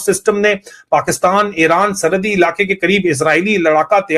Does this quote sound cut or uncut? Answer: uncut